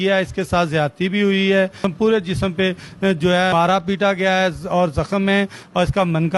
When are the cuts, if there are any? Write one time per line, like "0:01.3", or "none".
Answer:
0:01.8
0:03.5